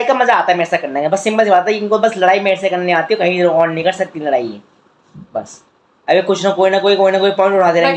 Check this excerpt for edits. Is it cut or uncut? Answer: uncut